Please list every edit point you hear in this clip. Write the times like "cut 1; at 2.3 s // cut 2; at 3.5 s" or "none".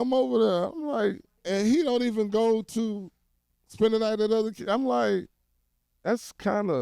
cut 1; at 1.3 s